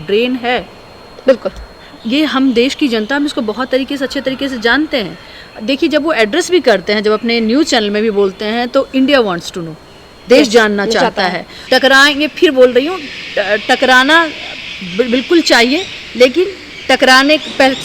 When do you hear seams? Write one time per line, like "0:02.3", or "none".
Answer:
0:11.7